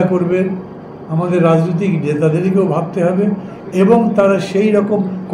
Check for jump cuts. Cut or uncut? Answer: uncut